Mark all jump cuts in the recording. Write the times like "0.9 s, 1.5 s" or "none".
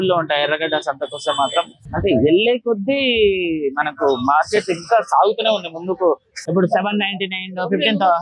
1.8 s, 6.4 s